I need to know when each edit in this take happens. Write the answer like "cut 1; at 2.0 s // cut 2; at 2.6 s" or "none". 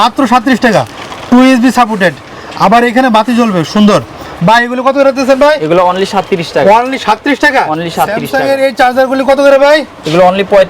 cut 1; at 8.2 s

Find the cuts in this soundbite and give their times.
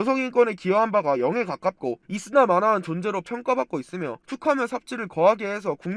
cut 1; at 2.0 s

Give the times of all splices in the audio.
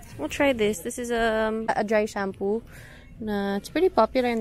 cut 1; at 1.7 s

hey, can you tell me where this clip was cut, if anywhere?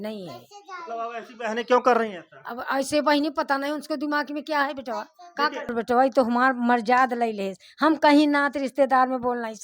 cut 1; at 5.7 s

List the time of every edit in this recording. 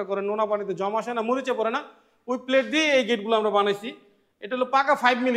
none

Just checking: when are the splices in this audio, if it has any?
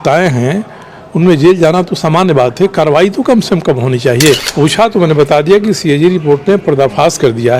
cut 1; at 4.5 s

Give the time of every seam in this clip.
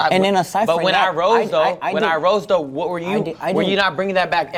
none

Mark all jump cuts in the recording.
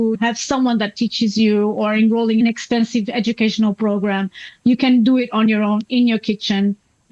none

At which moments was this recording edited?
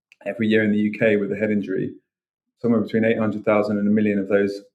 none

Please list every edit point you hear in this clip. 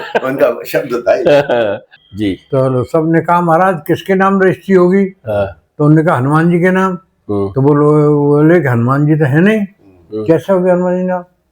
cut 1; at 1.9 s

